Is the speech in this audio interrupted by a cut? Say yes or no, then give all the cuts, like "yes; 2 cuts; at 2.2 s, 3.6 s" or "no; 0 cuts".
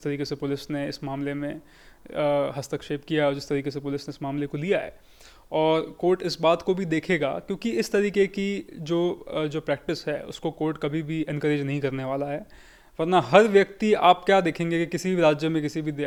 no; 0 cuts